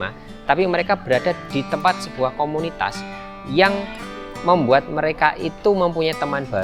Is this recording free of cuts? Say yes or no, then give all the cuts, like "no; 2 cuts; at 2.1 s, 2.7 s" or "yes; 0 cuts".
yes; 0 cuts